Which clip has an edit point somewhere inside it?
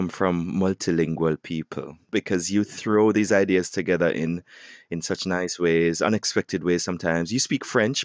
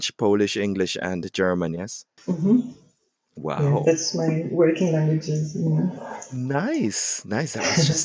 first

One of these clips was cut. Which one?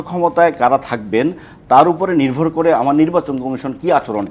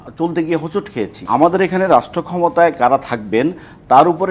second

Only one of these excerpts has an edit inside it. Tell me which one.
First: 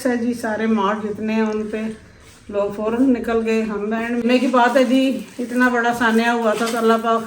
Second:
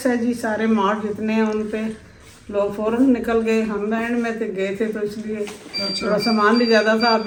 first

